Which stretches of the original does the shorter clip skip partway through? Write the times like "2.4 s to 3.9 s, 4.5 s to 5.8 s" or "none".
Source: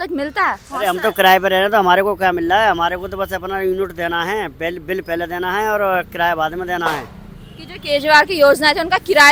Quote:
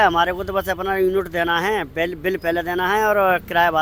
none

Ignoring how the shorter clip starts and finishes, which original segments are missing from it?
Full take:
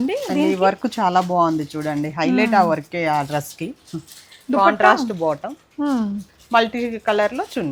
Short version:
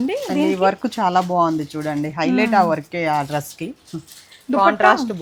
none

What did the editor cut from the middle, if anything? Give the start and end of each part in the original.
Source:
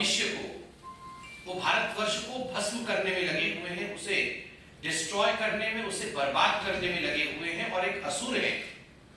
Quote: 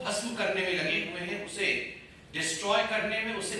none

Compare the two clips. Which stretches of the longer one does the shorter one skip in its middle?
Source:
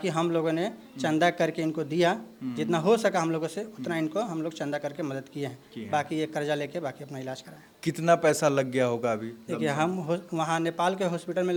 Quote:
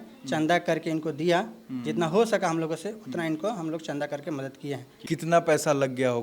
5.6 s to 7.7 s

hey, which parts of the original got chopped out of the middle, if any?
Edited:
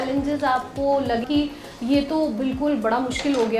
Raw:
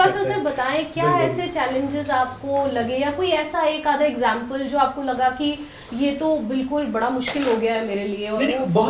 2.9 s to 5.3 s

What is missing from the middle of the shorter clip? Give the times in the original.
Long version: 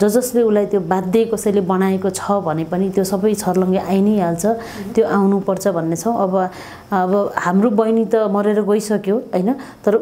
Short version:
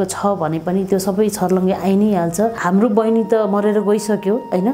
4.6 s to 7.4 s

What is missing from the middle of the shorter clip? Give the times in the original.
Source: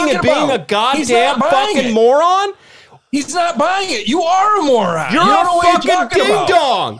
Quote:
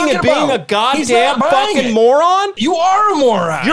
2.5 s to 4.0 s

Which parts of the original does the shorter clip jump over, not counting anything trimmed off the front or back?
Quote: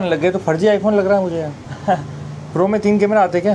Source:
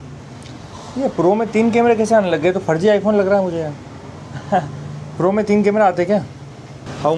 3.9 s to 4.3 s

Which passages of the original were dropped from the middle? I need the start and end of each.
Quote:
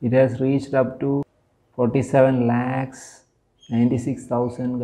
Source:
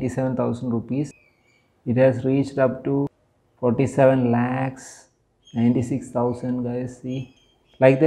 none

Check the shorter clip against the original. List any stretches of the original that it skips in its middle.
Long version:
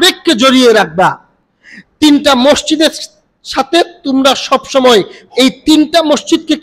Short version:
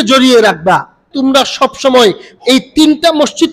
1.4 s to 4.0 s

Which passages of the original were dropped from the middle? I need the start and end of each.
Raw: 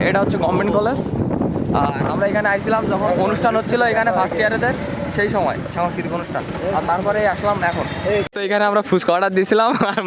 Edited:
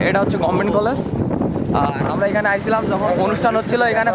none

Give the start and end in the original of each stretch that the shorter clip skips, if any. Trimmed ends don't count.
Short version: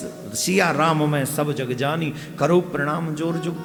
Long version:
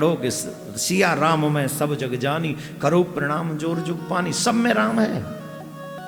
none

